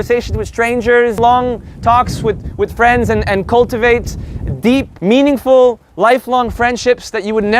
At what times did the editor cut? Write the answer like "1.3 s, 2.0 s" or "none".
1.2 s, 4.9 s, 5.9 s

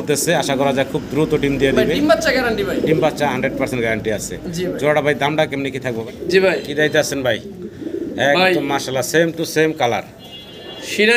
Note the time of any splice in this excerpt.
6.0 s

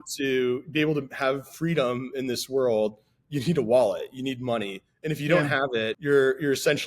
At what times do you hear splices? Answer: 6.0 s

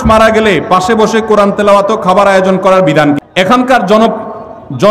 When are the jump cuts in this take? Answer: 3.2 s

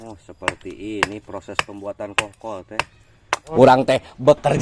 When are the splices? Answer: 3.5 s

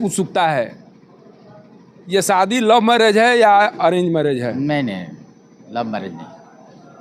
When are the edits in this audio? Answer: none

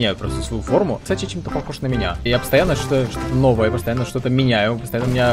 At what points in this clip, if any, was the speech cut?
1.0 s, 2.3 s

